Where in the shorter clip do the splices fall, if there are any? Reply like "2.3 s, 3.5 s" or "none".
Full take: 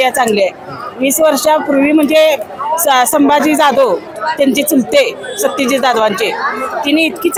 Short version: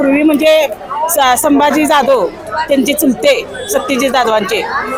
none